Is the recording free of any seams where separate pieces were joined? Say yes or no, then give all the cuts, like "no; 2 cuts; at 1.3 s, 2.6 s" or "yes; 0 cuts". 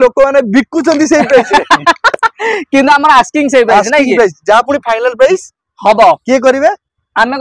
yes; 0 cuts